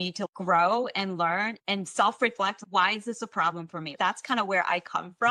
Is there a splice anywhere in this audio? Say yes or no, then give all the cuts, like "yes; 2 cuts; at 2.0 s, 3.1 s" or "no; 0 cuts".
no; 0 cuts